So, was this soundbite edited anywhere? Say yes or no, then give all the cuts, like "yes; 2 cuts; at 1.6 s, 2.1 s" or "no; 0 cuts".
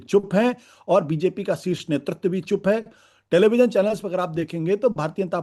no; 0 cuts